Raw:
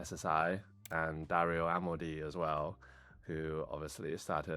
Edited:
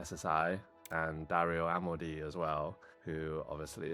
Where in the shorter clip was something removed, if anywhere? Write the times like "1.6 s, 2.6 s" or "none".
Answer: 2.9 s